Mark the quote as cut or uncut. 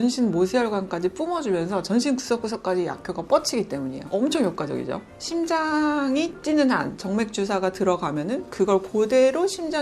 uncut